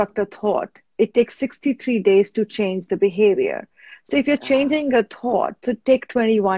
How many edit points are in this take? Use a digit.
0